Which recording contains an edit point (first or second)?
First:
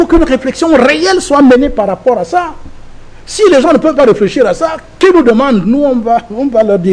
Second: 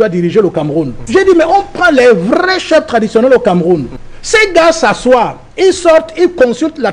second